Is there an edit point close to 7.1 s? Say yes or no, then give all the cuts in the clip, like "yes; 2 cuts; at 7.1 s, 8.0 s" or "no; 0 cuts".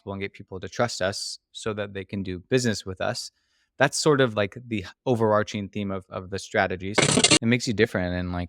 yes; 1 cut; at 7.1 s